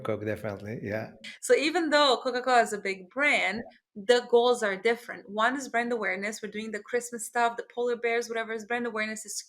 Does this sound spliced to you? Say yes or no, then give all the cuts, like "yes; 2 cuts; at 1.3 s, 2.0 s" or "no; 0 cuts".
yes; 1 cut; at 1.0 s